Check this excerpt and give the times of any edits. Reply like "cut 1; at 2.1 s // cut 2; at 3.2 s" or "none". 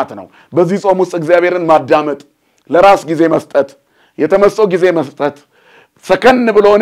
none